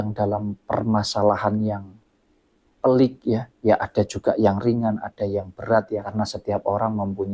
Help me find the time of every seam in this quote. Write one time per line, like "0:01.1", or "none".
0:06.1